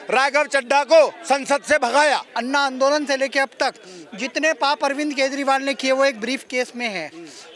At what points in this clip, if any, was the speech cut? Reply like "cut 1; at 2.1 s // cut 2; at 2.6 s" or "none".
cut 1; at 2.3 s